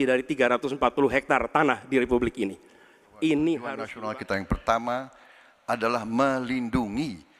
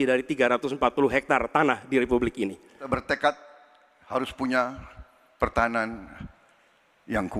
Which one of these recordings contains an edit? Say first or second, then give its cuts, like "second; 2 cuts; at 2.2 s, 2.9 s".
second; 1 cut; at 2.8 s